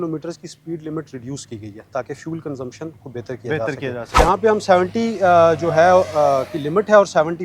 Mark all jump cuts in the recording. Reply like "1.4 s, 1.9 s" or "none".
4.2 s